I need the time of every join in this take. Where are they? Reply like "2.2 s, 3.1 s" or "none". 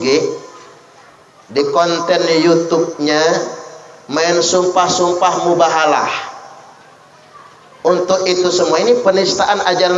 none

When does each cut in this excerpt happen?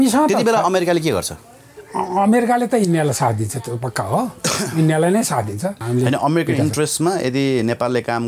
5.8 s

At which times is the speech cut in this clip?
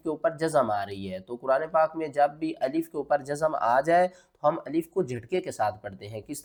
none

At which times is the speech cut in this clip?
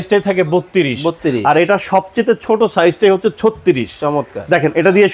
none

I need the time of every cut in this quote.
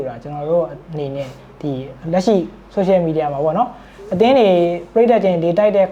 none

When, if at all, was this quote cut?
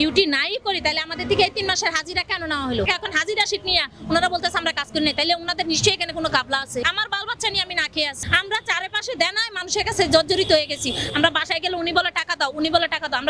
2.9 s, 6.8 s, 8.2 s

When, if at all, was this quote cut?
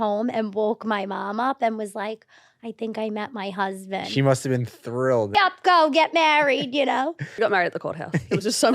5.3 s, 7.4 s

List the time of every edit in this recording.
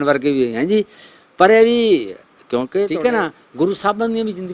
2.9 s

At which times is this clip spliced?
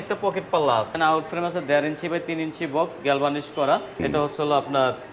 0.9 s, 4.0 s

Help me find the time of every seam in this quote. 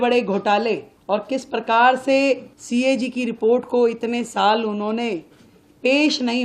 0.9 s, 2.5 s

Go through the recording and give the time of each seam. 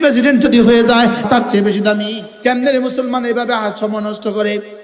1.2 s, 2.3 s

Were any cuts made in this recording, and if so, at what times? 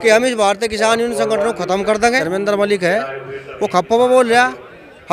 2.2 s

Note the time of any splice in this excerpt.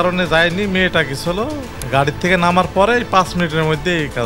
1.7 s

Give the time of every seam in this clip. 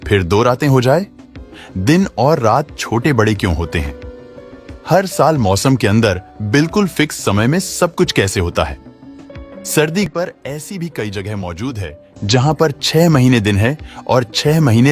10.1 s

